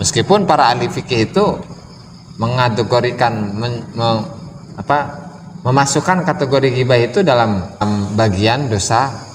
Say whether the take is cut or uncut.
cut